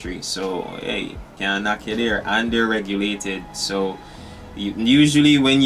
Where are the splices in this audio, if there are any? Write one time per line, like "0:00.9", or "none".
none

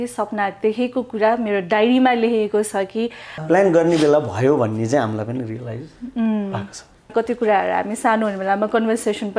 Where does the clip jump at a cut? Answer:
0:03.3
0:07.1

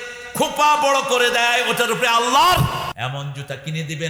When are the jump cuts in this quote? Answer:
0:02.9

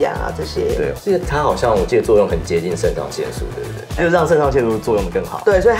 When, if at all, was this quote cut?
none

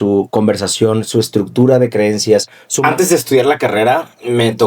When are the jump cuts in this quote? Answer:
0:02.6

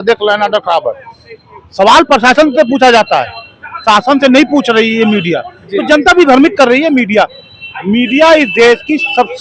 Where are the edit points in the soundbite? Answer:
none

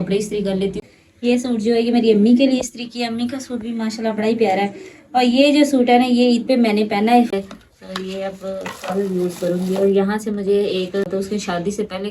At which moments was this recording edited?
0:00.8
0:07.3
0:11.0

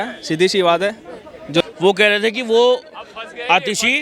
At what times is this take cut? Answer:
0:01.6

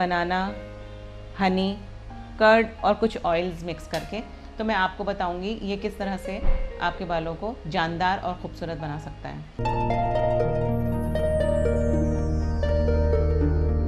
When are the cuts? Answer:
none

